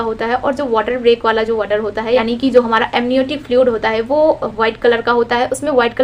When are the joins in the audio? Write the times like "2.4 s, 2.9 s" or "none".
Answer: none